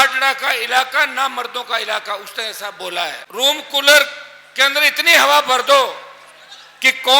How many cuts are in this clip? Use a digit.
1